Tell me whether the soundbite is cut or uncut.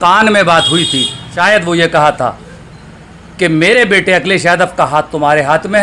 cut